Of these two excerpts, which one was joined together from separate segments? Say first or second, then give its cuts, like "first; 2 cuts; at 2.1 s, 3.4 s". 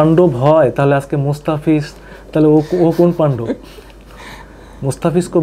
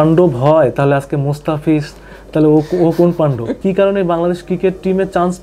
second; 1 cut; at 3.6 s